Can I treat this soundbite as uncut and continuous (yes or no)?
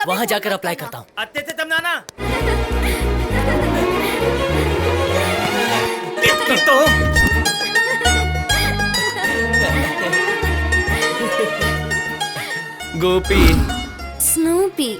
no